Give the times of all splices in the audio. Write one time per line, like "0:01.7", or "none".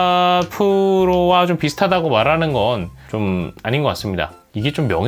none